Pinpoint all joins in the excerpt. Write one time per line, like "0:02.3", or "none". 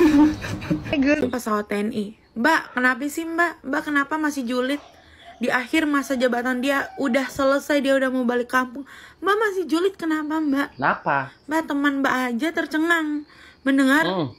0:01.2